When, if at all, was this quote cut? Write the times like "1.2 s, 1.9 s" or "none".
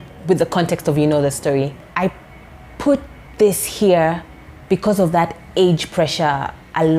1.9 s